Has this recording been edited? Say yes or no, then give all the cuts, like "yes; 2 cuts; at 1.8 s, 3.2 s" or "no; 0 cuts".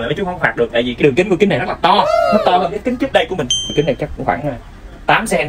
yes; 2 cuts; at 1.0 s, 3.7 s